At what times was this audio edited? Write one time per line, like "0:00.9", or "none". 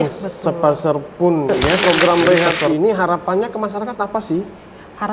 0:01.8